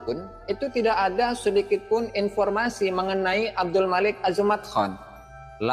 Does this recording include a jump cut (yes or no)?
no